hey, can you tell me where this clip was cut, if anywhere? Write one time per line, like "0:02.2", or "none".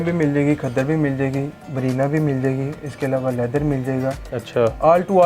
0:01.6